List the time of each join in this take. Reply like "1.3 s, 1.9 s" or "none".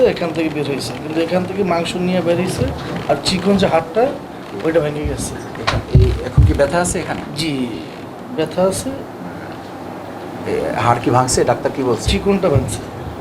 none